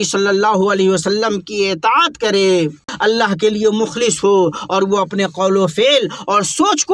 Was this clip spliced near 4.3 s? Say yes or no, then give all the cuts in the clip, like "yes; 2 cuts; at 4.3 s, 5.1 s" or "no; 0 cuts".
no; 1 cut; at 2.9 s